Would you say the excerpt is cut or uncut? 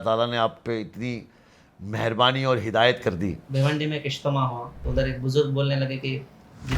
cut